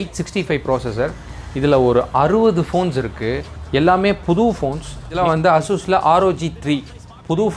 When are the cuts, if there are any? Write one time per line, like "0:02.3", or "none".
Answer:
0:05.2